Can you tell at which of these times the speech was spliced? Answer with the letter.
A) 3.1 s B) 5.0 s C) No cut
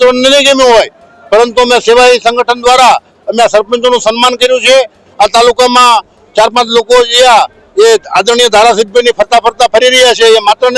B